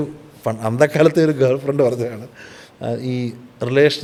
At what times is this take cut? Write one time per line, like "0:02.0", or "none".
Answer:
none